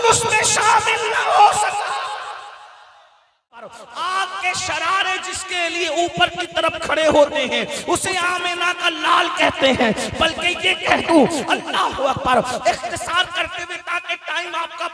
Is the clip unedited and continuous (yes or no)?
no